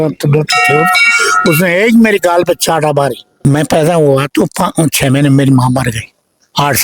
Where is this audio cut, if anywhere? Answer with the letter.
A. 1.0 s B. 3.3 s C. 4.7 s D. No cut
B